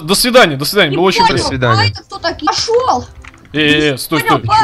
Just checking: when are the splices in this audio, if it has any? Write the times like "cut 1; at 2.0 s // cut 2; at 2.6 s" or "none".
cut 1; at 2.5 s